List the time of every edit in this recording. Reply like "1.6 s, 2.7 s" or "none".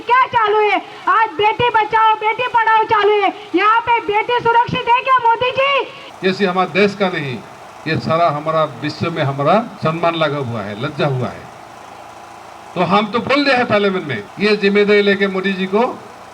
6.0 s, 9.7 s, 14.2 s